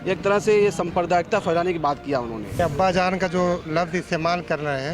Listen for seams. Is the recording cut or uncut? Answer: cut